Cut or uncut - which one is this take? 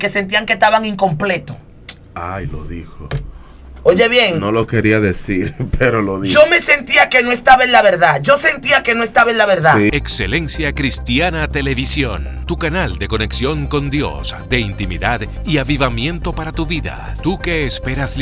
cut